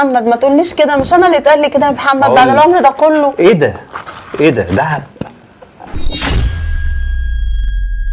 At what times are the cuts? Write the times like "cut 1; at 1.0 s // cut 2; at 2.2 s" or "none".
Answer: cut 1; at 6.1 s

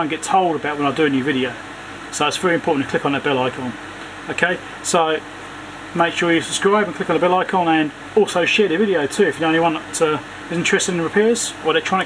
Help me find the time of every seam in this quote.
none

